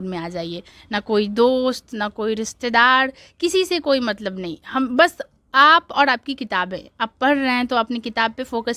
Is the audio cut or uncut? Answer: uncut